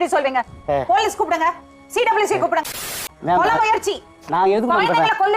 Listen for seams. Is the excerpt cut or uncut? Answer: cut